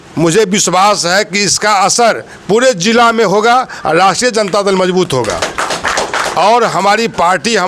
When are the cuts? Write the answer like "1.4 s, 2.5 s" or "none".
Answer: none